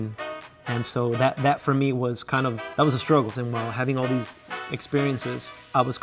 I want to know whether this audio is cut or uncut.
cut